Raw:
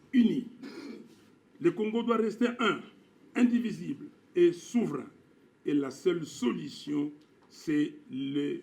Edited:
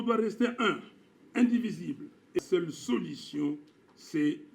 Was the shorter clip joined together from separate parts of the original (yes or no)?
yes